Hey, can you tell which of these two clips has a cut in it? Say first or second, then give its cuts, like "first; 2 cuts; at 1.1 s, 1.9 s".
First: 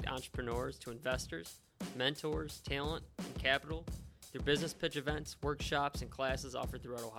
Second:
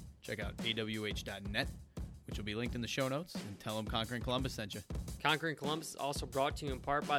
second; 1 cut; at 5.1 s